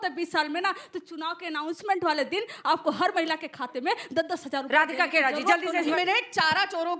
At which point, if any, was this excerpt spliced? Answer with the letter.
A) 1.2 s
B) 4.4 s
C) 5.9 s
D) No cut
C